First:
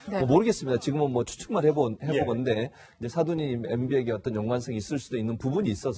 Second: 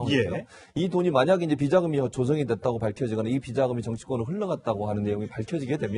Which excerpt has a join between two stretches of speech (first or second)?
first